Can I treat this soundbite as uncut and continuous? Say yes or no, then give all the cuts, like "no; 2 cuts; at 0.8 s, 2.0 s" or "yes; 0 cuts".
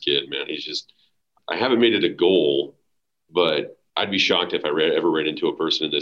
no; 1 cut; at 1.2 s